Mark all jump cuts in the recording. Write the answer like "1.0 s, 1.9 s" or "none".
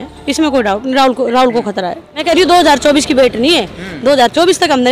2.1 s